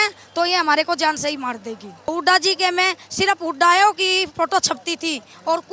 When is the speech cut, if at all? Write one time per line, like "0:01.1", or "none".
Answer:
0:02.1

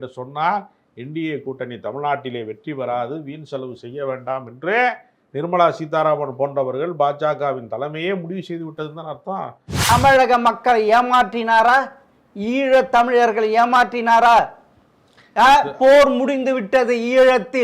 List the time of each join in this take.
0:09.9

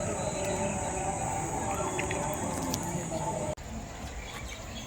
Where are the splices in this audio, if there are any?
0:03.6

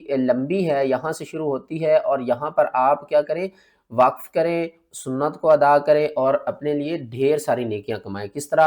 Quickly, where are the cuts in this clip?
none

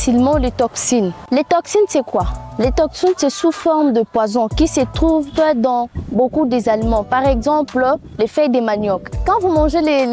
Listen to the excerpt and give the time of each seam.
0:09.1

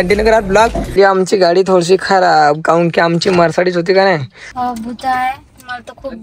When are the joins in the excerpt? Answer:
0:00.9
0:04.4

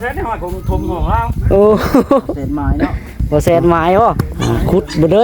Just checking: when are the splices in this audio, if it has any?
0:04.3

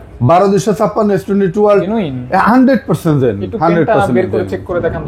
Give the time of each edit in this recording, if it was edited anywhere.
0:01.9

